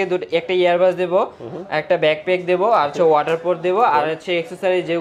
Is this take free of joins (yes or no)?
yes